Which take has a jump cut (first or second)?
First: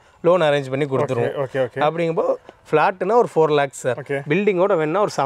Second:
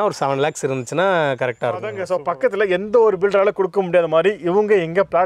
second